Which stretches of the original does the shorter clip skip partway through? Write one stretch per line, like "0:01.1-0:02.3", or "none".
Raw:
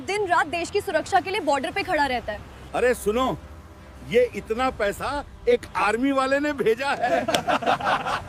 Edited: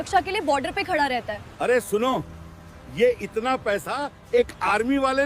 0:02.4-0:02.6